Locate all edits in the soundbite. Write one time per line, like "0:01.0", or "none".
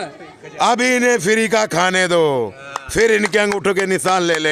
none